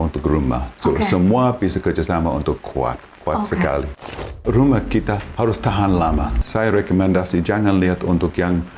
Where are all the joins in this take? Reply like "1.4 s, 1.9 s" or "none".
4.3 s, 6.4 s